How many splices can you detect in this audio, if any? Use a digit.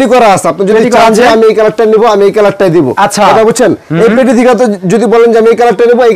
0